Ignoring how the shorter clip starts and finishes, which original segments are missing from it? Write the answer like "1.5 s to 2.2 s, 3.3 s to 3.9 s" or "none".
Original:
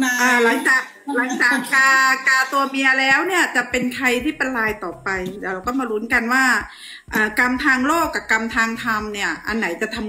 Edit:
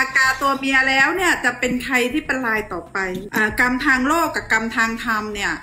5.3 s to 7.0 s